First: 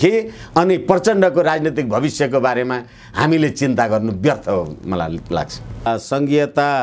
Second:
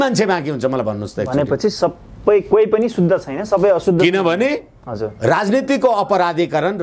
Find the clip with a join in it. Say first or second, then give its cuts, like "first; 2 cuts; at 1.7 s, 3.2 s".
first; 1 cut; at 5.9 s